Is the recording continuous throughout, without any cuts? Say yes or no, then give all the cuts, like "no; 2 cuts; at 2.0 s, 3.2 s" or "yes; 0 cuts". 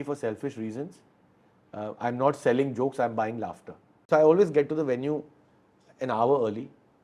no; 1 cut; at 4.0 s